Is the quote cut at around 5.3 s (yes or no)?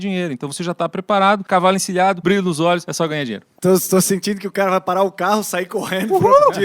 no